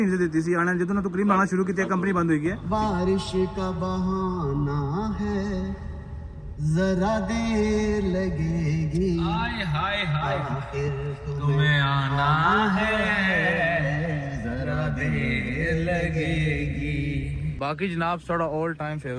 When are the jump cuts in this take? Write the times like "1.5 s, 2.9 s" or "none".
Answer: 2.6 s, 17.4 s